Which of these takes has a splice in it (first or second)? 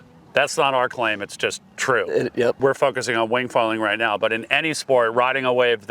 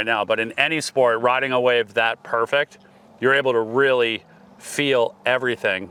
first